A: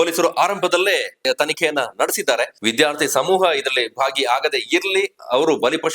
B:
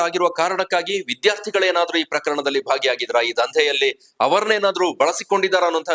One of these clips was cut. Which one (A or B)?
A